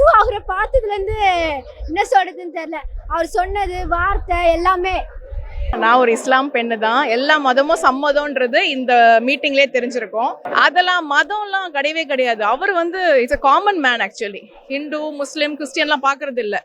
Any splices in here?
yes; 2 cuts; at 5.7 s, 10.4 s

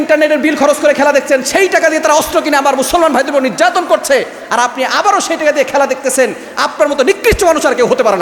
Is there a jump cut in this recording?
no; 0 cuts

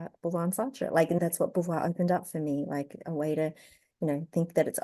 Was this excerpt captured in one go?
no; 1 cut; at 1.2 s

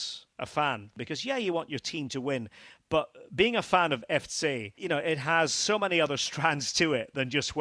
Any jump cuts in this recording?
yes; 2 cuts; at 0.9 s, 4.7 s

